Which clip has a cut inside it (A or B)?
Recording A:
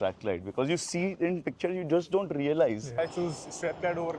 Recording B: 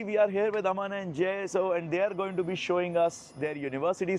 A